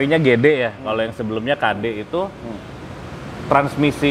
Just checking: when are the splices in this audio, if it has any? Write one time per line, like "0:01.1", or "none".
none